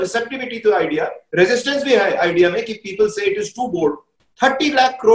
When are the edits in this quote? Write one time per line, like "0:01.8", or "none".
0:04.1